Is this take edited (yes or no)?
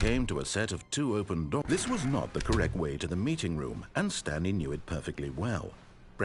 yes